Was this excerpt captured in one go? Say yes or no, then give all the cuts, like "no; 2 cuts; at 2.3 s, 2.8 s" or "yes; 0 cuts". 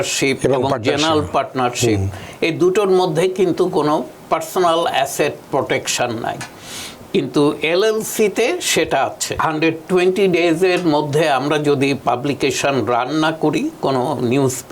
no; 1 cut; at 9.3 s